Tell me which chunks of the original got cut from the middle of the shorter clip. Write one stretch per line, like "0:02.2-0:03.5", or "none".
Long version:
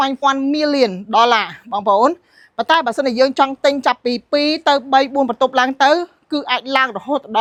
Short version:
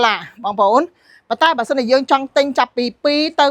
none

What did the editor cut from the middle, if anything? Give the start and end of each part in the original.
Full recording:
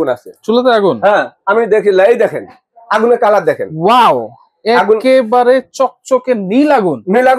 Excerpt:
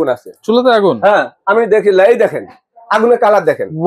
none

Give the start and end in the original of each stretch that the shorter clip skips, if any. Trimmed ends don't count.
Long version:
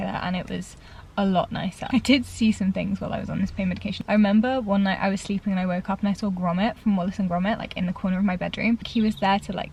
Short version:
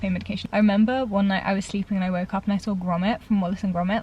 none

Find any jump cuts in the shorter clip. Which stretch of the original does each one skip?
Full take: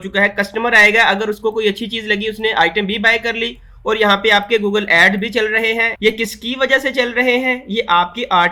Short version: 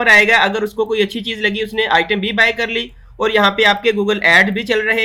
none

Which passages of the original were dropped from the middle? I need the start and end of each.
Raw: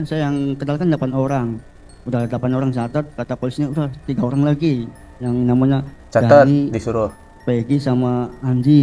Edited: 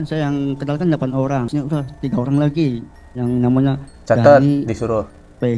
0:01.5-0:03.5

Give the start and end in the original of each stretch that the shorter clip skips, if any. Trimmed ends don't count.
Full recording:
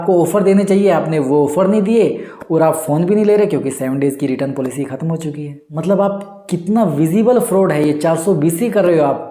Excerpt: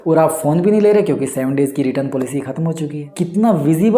0:05.5-0:06.4

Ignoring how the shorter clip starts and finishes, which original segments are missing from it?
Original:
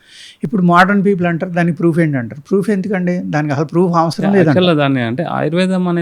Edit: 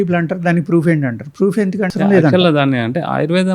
0:03.0-0:04.1

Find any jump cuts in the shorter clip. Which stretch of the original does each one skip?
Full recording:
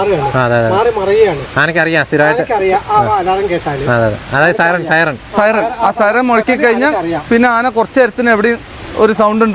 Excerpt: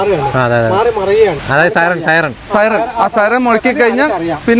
0:01.4-0:04.3

